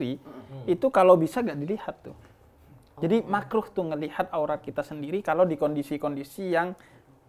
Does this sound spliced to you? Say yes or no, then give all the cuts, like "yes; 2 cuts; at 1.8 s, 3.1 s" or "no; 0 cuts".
no; 0 cuts